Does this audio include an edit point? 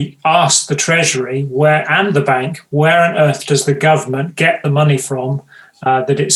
no; 0 cuts

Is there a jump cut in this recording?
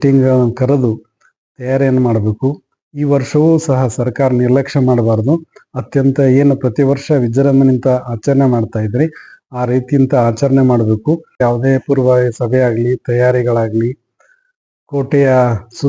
yes; 1 cut; at 11.4 s

